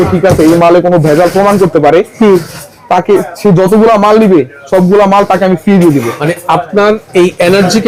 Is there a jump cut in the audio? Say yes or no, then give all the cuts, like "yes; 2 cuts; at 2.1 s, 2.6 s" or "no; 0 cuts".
no; 0 cuts